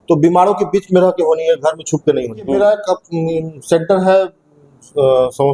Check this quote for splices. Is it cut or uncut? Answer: cut